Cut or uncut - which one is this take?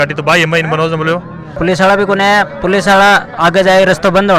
cut